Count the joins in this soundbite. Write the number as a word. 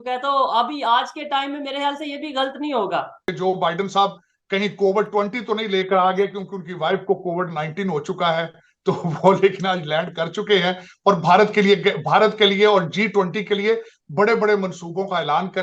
one